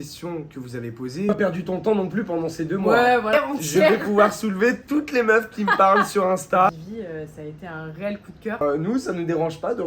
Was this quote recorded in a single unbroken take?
no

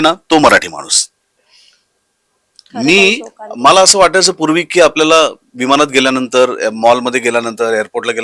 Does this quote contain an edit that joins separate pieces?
no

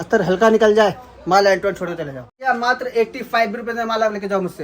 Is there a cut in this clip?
yes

